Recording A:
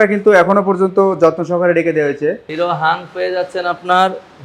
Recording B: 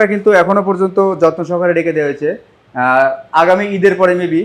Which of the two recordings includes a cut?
A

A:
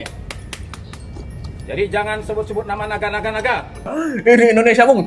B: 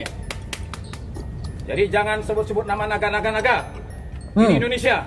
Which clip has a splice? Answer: A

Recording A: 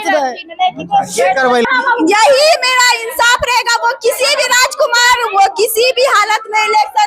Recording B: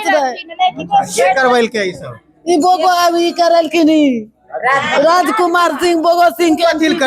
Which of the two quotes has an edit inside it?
A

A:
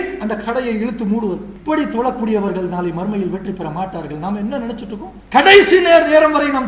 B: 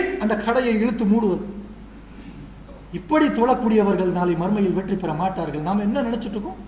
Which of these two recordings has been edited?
A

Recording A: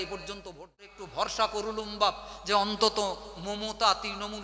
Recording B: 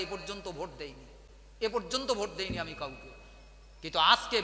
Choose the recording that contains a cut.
A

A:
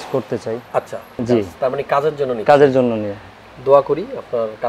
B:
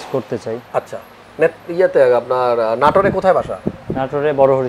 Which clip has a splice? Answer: A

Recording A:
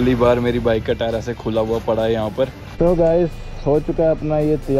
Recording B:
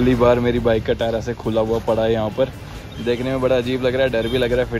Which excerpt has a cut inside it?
A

